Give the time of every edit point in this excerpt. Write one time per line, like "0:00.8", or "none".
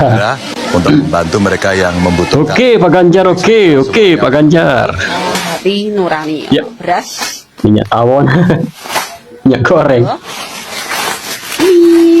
0:05.3